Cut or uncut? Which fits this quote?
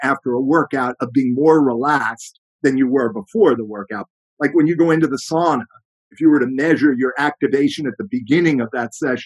cut